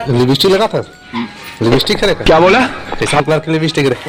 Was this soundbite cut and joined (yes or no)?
no